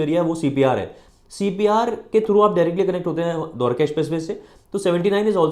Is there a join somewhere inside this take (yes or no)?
no